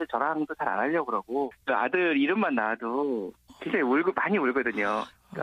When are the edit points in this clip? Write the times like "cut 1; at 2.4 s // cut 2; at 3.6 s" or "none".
cut 1; at 1.2 s

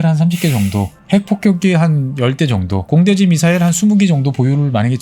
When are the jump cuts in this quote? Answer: cut 1; at 1.0 s // cut 2; at 2.9 s

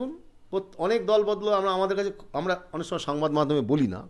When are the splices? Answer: none

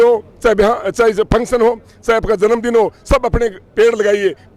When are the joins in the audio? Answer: none

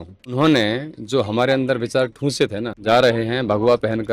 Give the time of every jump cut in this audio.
cut 1; at 2.8 s

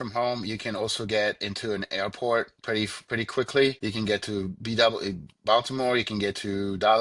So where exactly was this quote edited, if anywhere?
cut 1; at 3.8 s

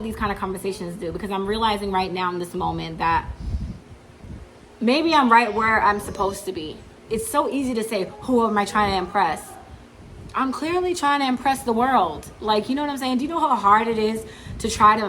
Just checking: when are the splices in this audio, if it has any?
cut 1; at 7.0 s

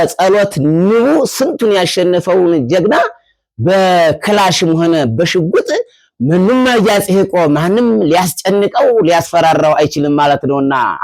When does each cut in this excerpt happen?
none

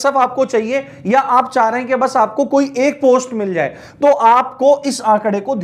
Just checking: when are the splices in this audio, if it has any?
none

